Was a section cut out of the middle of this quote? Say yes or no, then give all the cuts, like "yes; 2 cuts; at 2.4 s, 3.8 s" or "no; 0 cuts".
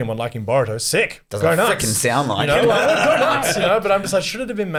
no; 0 cuts